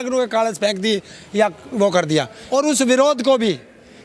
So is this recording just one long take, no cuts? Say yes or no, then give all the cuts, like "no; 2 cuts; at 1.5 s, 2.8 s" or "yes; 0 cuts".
no; 1 cut; at 2.4 s